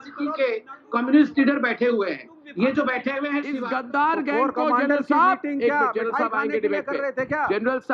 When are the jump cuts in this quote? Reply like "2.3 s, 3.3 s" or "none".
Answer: 3.6 s